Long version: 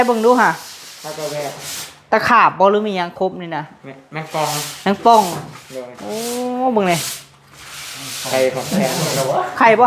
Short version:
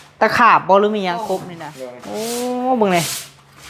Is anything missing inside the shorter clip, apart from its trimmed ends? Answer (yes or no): yes